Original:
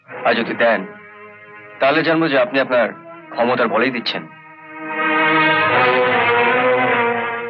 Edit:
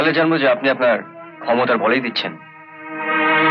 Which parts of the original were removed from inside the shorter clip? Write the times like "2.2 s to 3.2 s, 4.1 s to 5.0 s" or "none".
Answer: none